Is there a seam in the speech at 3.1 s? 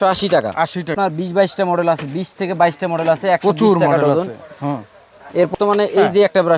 no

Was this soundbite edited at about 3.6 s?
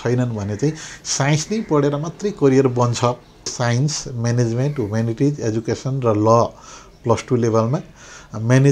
yes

